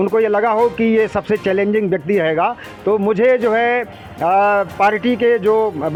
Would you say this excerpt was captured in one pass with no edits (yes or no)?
yes